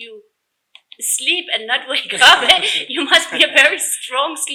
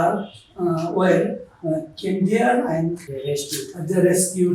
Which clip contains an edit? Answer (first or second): second